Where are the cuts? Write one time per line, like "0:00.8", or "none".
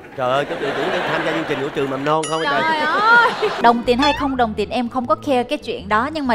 0:03.6